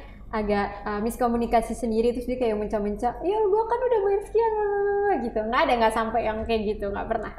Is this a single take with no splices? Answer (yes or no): yes